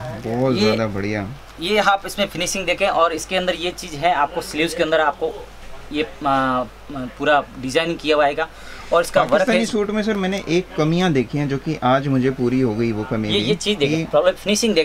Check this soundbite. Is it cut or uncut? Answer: uncut